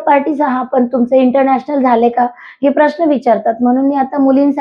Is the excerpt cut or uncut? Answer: uncut